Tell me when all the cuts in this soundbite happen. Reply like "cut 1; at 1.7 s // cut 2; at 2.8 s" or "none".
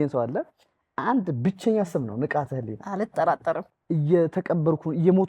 cut 1; at 3.7 s